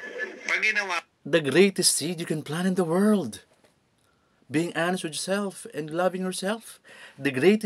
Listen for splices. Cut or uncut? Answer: uncut